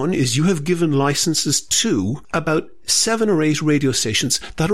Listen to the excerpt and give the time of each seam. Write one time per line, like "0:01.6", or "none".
0:02.2